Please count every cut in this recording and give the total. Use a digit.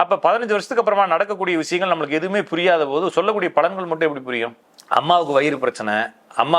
1